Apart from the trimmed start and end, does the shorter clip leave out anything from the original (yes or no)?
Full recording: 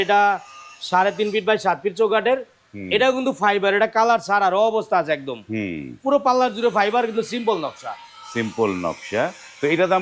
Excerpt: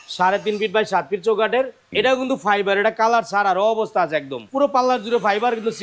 yes